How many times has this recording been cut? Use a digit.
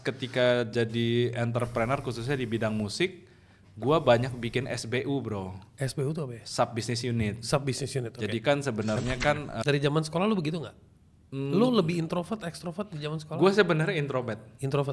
1